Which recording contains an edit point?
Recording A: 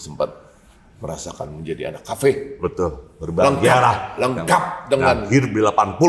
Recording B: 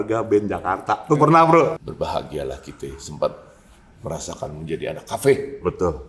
B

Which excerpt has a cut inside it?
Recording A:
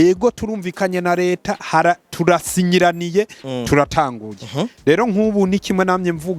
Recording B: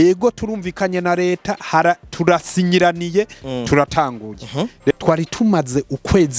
B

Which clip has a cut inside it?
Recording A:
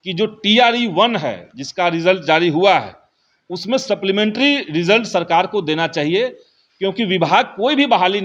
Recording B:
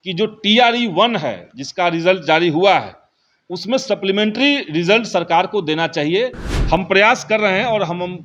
B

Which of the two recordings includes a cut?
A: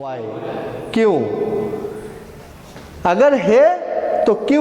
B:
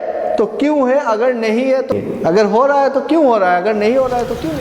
B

